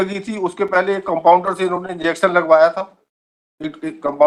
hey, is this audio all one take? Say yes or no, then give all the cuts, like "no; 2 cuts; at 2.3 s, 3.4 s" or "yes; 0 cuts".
yes; 0 cuts